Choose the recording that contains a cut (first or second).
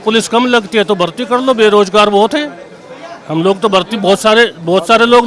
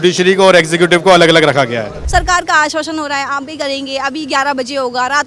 second